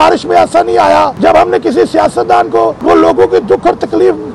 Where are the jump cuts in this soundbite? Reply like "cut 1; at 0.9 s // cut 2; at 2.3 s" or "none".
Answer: cut 1; at 1.1 s // cut 2; at 2.8 s